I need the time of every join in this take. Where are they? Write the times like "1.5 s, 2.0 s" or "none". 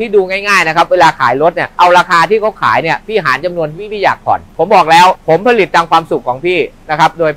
1.7 s, 4.5 s